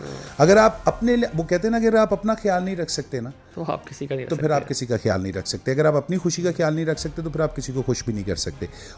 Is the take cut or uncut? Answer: uncut